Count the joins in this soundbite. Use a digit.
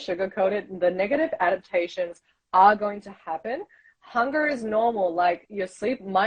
0